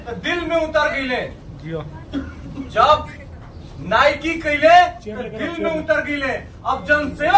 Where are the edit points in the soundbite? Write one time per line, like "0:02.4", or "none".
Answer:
none